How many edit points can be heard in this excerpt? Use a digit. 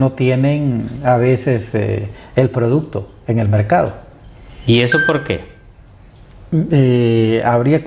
0